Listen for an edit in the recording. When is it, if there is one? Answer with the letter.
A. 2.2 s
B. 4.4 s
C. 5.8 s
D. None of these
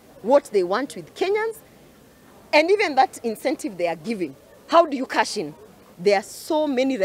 C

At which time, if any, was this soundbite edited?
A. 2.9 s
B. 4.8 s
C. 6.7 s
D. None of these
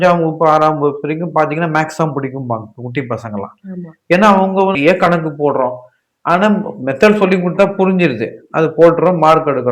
B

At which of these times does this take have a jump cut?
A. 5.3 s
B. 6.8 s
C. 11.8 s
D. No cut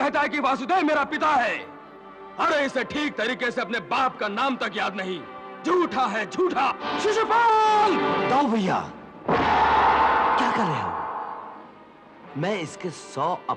B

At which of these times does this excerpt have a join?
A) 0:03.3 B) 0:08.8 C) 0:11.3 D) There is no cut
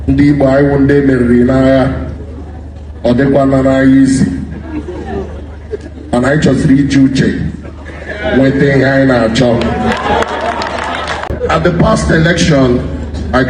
C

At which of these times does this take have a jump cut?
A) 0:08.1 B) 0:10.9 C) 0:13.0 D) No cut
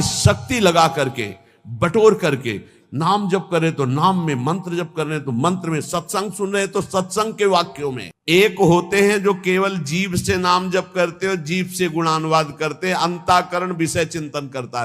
A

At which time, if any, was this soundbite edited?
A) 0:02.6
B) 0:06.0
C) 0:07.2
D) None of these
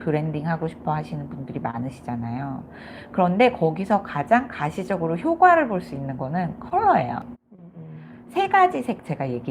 C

